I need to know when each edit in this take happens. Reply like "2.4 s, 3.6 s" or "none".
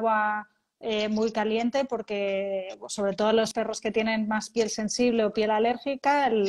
3.5 s